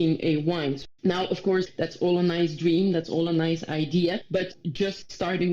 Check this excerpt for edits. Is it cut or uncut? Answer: cut